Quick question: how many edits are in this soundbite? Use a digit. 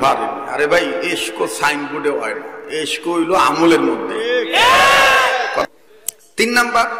1